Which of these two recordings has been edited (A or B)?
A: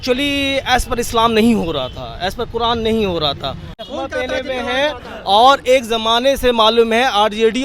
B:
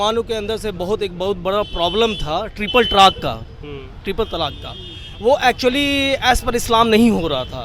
A